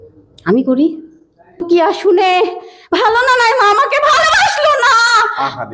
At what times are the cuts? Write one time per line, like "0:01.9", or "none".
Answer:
0:01.6